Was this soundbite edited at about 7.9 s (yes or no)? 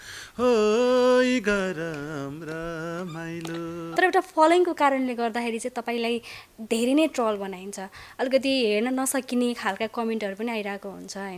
no